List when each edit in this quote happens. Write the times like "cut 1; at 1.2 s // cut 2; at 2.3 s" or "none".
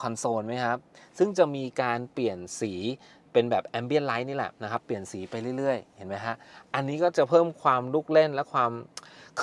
none